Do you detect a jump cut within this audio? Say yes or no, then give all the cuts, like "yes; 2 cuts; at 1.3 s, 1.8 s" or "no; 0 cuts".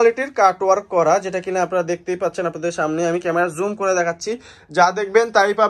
no; 0 cuts